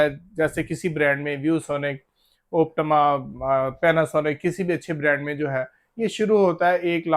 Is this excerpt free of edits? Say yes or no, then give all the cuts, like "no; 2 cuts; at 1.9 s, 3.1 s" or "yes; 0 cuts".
yes; 0 cuts